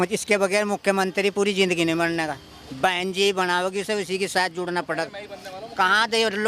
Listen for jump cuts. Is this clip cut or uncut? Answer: uncut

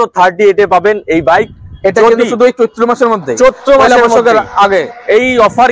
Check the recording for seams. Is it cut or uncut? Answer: uncut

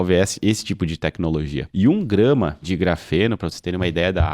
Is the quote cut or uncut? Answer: cut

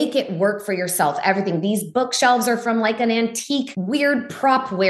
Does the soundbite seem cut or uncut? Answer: cut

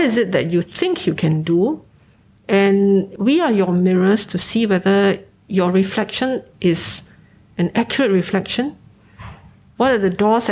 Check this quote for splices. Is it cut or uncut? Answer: cut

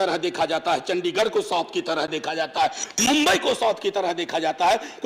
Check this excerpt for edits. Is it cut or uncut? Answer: uncut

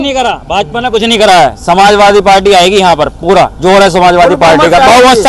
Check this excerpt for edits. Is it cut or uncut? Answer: uncut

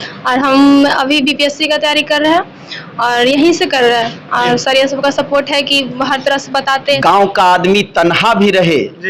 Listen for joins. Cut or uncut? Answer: cut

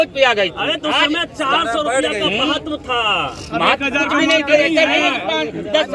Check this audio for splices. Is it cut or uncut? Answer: uncut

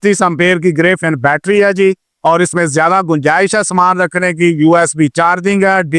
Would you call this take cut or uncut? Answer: uncut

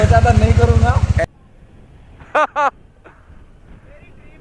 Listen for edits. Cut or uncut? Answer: cut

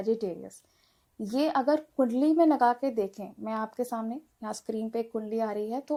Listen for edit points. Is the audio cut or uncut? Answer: uncut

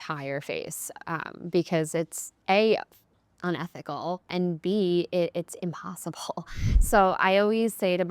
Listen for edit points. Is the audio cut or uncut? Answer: cut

